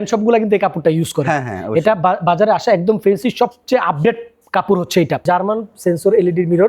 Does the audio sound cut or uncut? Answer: cut